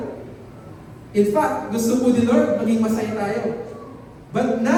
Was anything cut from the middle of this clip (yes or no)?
no